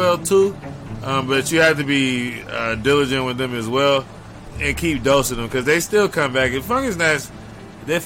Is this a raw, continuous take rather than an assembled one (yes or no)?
yes